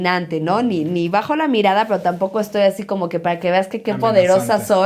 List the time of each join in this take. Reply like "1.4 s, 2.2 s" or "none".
none